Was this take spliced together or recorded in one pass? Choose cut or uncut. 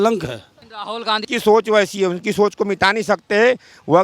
cut